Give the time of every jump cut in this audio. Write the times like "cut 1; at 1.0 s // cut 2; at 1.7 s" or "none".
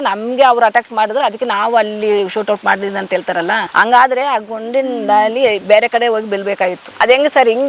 none